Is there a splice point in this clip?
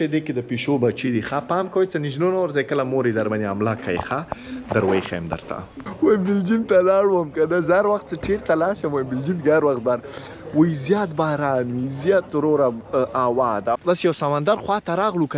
yes; 2 cuts; at 5.8 s, 13.8 s

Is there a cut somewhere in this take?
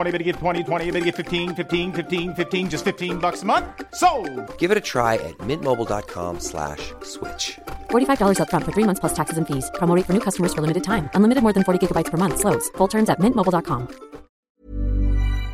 yes; 1 cut; at 14.5 s

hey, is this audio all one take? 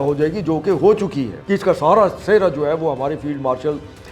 no; 1 cut; at 1.3 s

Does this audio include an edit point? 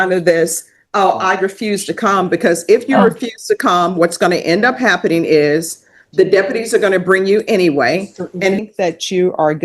yes; 1 cut; at 8.6 s

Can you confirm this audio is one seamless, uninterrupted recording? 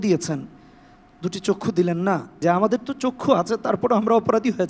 no; 1 cut; at 2.4 s

